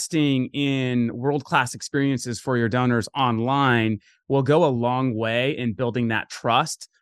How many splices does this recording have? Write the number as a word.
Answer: zero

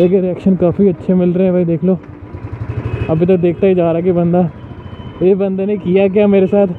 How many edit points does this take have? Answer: zero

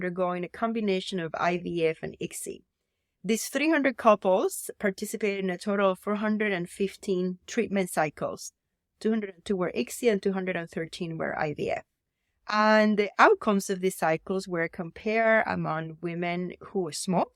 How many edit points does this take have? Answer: zero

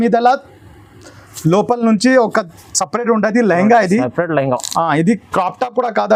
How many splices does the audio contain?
zero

